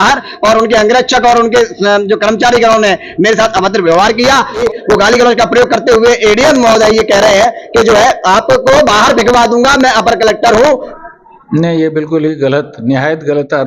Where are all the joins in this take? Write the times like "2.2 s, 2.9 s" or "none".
4.6 s, 10.9 s